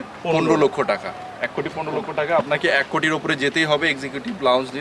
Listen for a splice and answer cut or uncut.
uncut